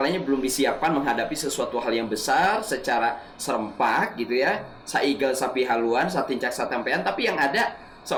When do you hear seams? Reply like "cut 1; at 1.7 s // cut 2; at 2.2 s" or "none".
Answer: none